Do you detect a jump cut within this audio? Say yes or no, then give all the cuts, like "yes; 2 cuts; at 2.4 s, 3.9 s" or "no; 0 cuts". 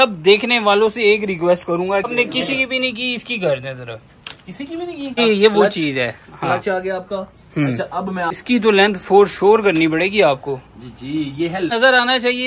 yes; 4 cuts; at 2.1 s, 5.2 s, 8.4 s, 11.7 s